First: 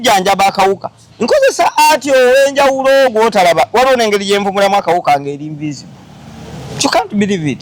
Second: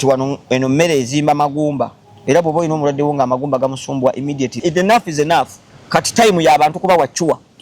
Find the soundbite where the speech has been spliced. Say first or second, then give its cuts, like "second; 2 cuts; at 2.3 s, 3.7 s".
second; 1 cut; at 4.6 s